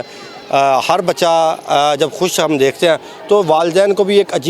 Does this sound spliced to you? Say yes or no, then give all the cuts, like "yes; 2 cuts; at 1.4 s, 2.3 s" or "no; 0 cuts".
no; 0 cuts